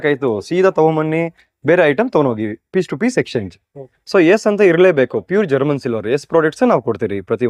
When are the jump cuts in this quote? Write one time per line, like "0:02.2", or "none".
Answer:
none